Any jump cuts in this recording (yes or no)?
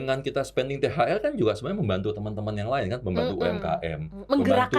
no